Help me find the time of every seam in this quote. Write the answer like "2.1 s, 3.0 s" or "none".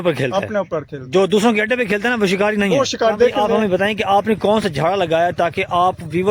3.3 s